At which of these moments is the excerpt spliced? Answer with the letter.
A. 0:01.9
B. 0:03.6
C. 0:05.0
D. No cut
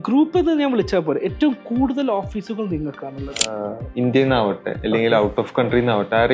B